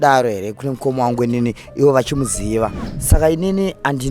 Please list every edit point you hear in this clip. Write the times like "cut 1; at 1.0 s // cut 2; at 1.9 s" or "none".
cut 1; at 2.9 s